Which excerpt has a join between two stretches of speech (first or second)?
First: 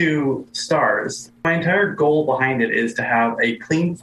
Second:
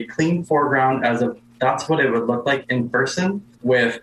first